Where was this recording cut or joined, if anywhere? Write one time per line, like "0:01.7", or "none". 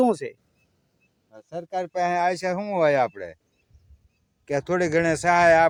none